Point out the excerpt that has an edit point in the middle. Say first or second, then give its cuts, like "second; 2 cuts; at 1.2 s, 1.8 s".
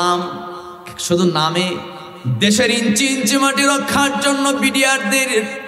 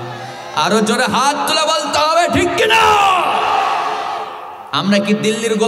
first; 1 cut; at 2.0 s